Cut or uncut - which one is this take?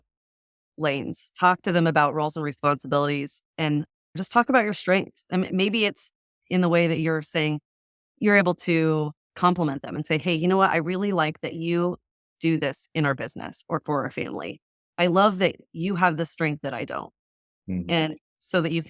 uncut